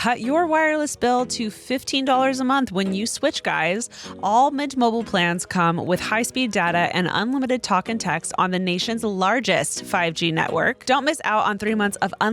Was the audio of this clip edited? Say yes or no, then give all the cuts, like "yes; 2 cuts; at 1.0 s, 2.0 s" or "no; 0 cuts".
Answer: yes; 1 cut; at 10.8 s